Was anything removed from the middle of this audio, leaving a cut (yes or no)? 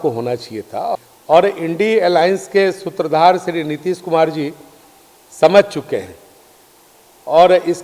yes